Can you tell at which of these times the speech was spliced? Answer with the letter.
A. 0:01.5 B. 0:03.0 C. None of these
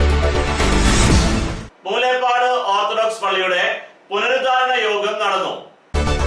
A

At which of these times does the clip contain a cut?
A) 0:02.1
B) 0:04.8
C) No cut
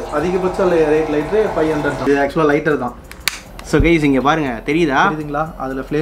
A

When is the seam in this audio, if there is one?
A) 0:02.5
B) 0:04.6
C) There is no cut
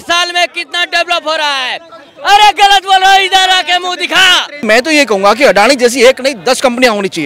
B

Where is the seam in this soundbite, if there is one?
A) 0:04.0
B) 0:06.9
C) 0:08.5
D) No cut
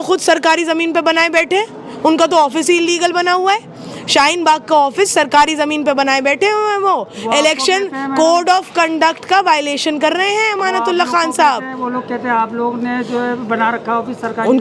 D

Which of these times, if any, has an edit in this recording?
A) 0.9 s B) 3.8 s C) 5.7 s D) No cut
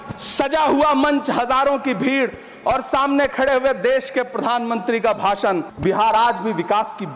C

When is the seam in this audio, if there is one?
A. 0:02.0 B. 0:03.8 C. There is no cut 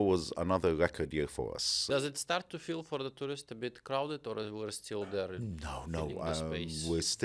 A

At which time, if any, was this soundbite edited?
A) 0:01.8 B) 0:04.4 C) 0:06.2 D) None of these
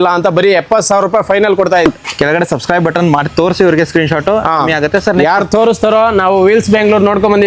A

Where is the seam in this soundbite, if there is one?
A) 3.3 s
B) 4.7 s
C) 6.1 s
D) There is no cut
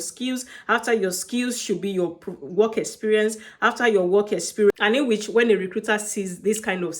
B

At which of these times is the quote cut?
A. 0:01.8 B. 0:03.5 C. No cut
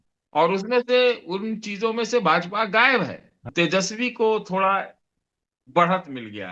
B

